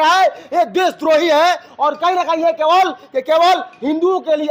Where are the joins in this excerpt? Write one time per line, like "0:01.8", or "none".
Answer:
none